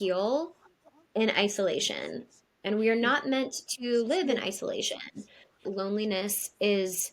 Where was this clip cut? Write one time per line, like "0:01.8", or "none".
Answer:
0:05.7